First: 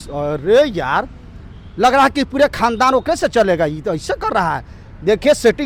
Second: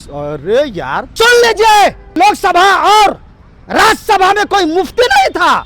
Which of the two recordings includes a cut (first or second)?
second